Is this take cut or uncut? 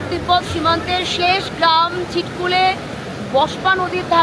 uncut